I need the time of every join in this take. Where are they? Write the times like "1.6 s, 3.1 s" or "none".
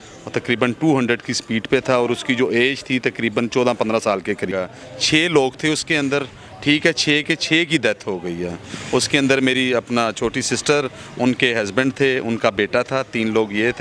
4.5 s